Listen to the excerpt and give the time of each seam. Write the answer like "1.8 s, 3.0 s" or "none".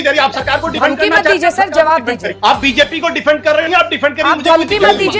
2.3 s